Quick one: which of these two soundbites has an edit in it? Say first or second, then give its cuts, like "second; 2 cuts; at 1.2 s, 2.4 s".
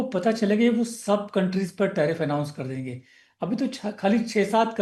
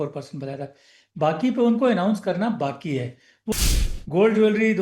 second; 1 cut; at 3.5 s